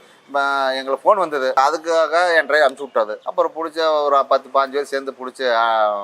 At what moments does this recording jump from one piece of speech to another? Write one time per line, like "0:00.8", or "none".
0:01.6
0:03.2